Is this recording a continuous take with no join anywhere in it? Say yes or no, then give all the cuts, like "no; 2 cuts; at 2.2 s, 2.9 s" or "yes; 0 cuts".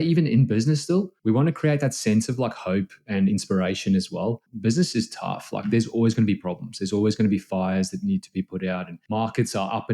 no; 2 cuts; at 1.1 s, 4.4 s